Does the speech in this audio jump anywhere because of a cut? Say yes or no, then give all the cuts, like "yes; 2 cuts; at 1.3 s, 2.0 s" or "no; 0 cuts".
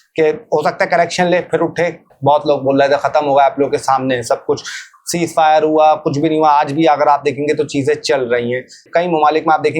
yes; 2 cuts; at 2.1 s, 8.8 s